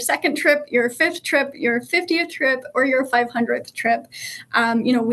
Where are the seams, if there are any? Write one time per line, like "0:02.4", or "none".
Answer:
none